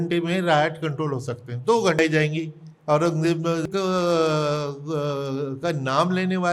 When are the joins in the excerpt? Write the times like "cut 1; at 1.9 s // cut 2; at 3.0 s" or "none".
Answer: cut 1; at 2.0 s // cut 2; at 3.6 s